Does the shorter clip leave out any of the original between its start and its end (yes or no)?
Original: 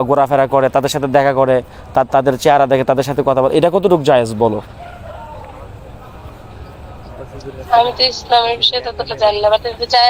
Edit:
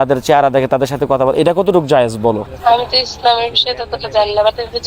yes